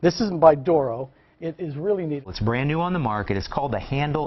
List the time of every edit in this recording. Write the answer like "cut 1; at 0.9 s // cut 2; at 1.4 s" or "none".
cut 1; at 2.3 s

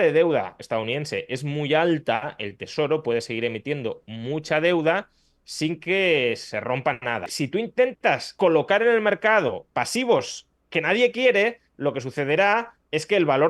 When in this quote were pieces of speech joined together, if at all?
cut 1; at 7.2 s // cut 2; at 8.3 s // cut 3; at 9.6 s

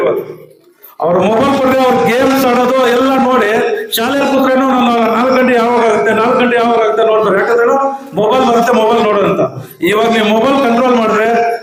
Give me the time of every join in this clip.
none

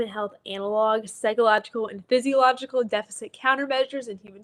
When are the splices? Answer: none

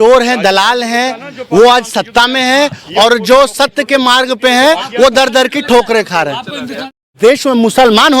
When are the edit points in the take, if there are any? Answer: cut 1; at 7.1 s

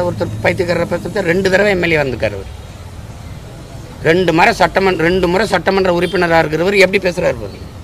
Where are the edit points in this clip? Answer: none

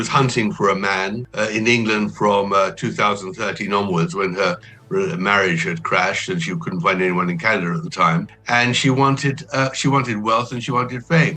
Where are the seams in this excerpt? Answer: cut 1; at 1.2 s // cut 2; at 4.7 s // cut 3; at 8.4 s

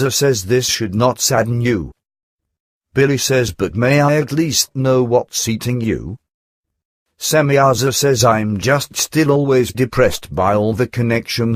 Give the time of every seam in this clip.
cut 1; at 7.6 s

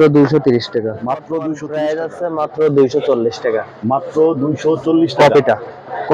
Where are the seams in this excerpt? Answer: cut 1; at 1.4 s

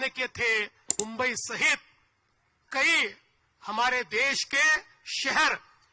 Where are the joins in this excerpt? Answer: cut 1; at 0.9 s

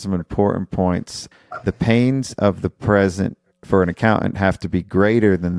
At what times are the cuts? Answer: cut 1; at 1.2 s

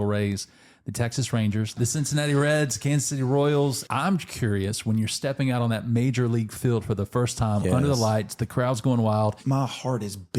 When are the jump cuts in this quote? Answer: cut 1; at 1.8 s // cut 2; at 3.8 s // cut 3; at 9.4 s

